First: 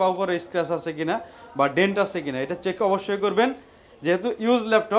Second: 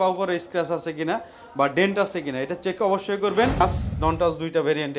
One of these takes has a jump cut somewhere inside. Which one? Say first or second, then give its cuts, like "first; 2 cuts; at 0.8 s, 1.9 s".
second; 1 cut; at 3.6 s